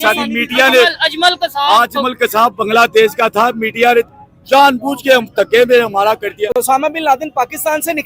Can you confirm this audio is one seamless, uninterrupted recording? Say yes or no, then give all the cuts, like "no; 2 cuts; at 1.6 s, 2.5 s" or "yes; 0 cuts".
no; 1 cut; at 6.6 s